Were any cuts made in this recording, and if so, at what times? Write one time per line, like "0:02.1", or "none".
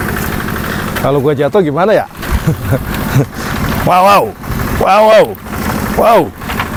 none